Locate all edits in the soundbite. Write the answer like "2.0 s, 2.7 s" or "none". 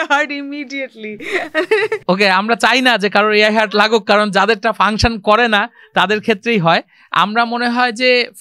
none